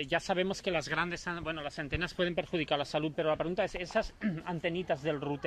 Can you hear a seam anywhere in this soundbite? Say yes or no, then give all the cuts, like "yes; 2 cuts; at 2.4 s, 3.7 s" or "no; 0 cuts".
no; 0 cuts